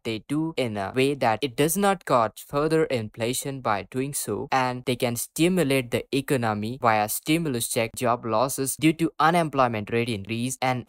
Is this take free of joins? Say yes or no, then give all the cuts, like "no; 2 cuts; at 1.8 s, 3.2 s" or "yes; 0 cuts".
no; 2 cuts; at 4.4 s, 7.9 s